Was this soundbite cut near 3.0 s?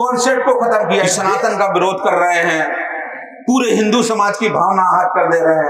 no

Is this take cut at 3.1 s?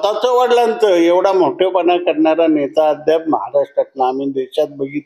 no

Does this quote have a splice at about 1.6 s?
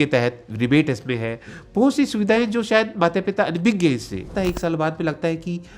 no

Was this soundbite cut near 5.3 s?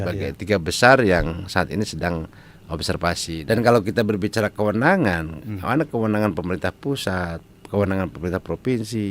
no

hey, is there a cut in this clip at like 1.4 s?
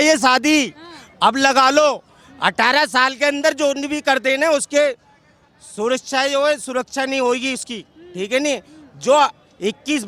no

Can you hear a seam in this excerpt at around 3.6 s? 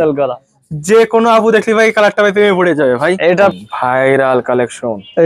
yes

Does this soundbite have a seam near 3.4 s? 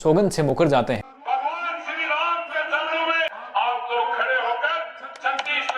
yes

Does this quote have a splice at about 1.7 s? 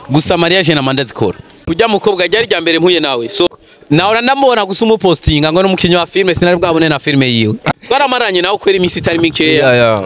yes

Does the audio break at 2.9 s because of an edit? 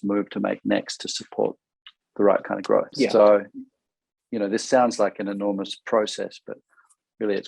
yes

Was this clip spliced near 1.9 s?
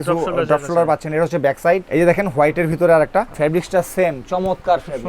yes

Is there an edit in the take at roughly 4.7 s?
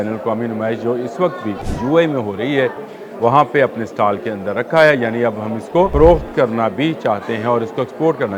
no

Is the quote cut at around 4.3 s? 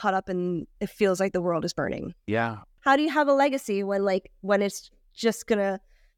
no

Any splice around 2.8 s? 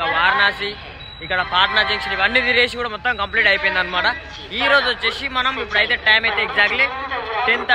no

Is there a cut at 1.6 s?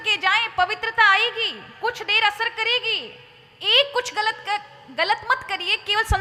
no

